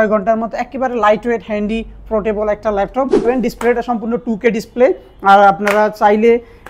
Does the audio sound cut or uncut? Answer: cut